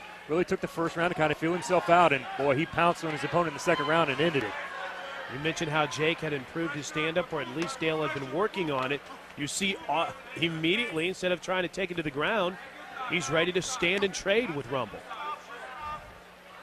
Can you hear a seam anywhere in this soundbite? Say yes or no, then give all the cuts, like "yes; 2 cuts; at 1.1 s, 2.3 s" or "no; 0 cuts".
no; 0 cuts